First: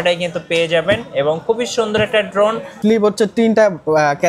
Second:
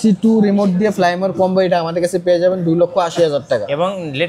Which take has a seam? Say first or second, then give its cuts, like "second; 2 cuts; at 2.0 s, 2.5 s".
first; 1 cut; at 2.8 s